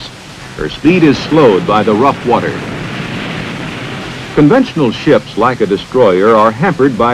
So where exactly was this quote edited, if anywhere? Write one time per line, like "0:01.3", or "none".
0:06.1